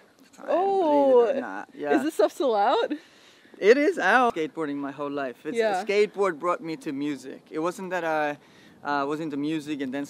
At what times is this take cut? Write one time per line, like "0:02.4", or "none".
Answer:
0:04.3